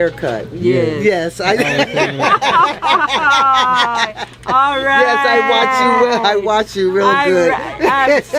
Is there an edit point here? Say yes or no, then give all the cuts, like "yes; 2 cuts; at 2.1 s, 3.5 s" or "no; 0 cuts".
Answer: no; 0 cuts